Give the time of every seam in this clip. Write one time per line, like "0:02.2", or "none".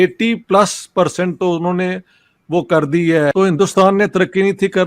0:03.3